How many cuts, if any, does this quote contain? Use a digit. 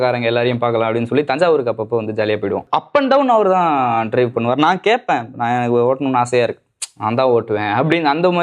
1